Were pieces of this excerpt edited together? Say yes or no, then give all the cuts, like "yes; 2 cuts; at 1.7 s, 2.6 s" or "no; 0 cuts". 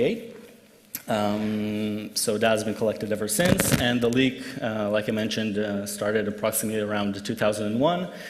yes; 1 cut; at 3.5 s